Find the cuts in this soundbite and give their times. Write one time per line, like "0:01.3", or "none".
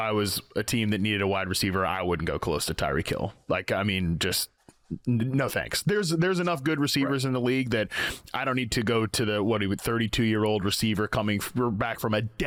none